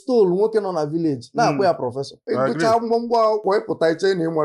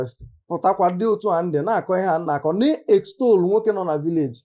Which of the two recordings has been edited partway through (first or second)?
first